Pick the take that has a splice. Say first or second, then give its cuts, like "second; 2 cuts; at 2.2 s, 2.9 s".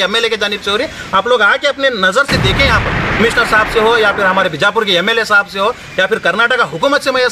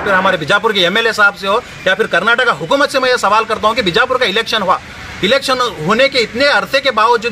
first; 1 cut; at 3.2 s